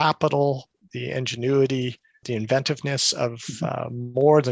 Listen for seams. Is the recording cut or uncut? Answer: cut